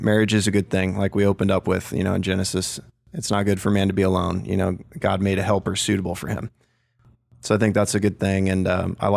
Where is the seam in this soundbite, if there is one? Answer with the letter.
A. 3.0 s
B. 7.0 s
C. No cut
B